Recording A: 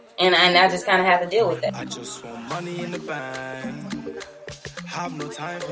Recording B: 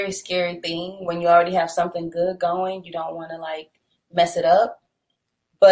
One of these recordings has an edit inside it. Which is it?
A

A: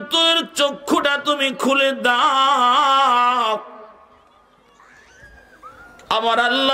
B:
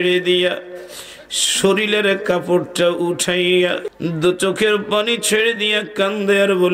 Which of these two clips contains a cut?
B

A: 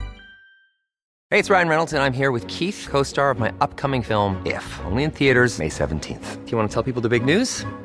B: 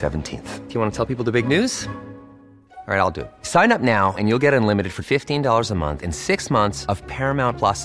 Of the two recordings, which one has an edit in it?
A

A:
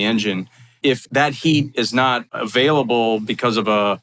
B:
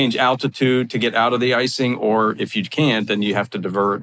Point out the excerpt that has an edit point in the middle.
A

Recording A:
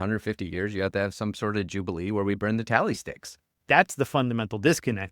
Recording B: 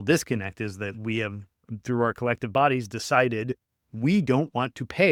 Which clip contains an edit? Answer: A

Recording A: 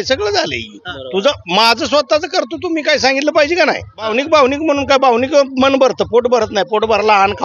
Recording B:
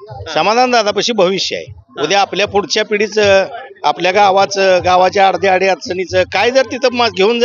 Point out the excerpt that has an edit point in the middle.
A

